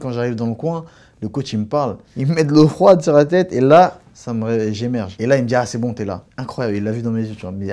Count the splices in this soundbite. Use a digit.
1